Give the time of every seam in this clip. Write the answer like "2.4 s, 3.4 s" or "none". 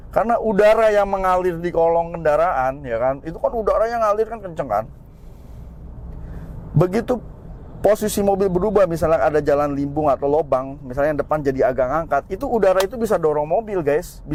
none